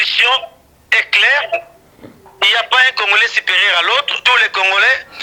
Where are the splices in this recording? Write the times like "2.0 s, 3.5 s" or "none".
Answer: none